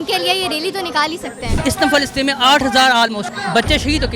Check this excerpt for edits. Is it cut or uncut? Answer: cut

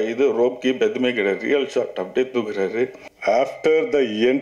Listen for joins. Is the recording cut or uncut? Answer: cut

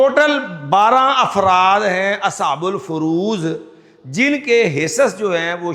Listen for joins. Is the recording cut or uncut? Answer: uncut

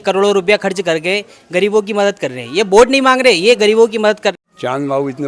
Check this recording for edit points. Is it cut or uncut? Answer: cut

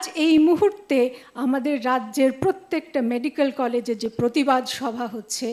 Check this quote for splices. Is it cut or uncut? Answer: uncut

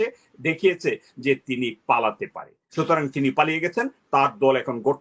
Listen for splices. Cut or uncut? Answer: uncut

